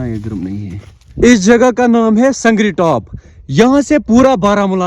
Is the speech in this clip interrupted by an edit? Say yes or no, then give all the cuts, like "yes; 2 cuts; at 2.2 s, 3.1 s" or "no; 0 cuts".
yes; 1 cut; at 1.1 s